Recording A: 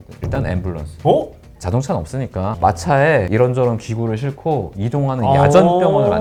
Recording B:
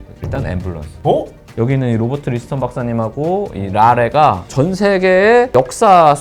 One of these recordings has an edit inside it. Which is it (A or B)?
B